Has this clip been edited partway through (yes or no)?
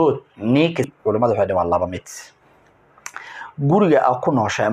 yes